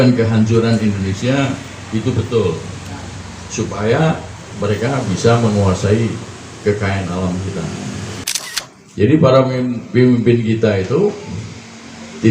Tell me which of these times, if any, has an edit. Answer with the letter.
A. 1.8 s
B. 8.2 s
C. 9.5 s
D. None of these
B